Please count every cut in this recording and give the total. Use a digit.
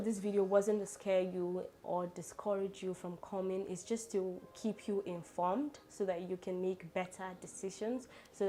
0